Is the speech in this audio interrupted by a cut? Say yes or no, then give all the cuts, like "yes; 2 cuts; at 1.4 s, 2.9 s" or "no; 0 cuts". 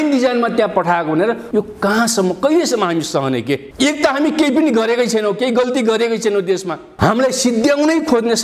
yes; 2 cuts; at 1.4 s, 6.8 s